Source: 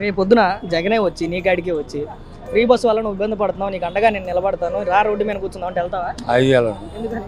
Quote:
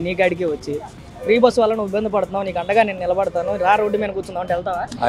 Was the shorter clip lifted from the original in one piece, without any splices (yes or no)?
yes